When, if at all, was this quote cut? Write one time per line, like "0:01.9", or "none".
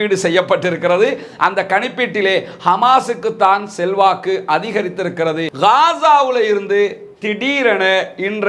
0:05.5